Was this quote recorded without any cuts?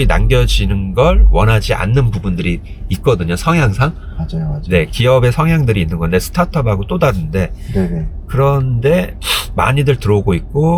yes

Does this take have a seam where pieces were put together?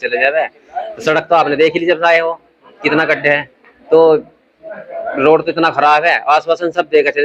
no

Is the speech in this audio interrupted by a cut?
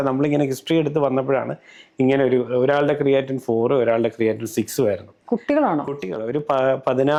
no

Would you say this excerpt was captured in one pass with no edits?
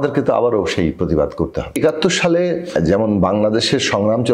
no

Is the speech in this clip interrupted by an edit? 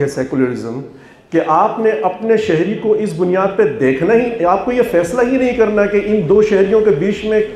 no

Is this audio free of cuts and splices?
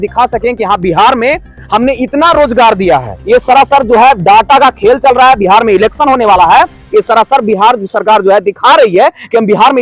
no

